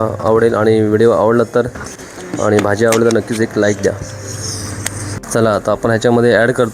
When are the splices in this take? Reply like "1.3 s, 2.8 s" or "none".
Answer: 5.2 s